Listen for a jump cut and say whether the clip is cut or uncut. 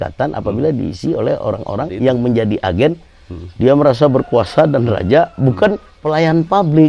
cut